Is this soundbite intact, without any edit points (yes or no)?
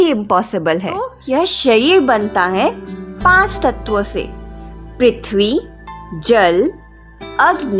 no